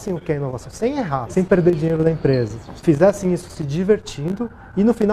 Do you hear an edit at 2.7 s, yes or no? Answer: yes